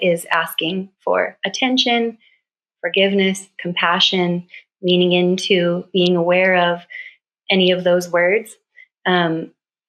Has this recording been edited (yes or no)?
no